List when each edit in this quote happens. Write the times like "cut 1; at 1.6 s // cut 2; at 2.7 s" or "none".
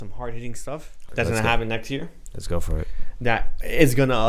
cut 1; at 1.1 s